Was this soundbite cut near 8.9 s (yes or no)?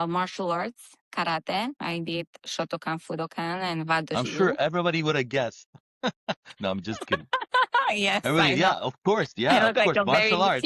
no